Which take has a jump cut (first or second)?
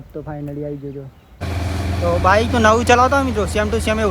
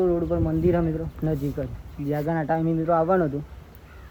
first